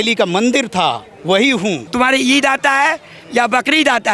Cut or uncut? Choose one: cut